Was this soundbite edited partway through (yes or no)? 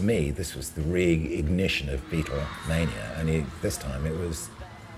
no